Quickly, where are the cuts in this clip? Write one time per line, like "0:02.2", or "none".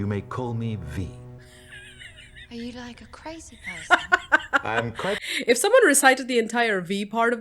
0:05.3

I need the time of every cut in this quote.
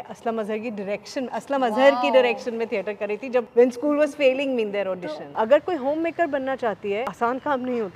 0:03.5
0:05.2
0:07.1

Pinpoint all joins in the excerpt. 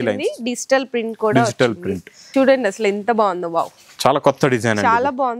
0:02.1

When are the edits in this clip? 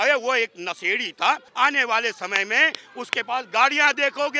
0:01.5

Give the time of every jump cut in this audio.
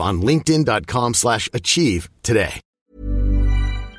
0:02.7

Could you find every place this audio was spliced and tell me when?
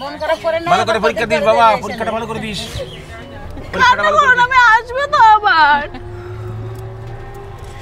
none

